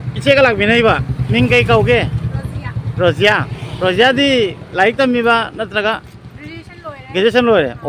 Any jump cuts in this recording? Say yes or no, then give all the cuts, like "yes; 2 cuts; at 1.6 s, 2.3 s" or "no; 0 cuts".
no; 0 cuts